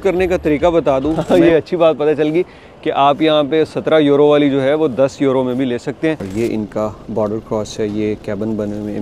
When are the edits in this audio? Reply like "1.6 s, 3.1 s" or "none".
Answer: 1.2 s, 6.3 s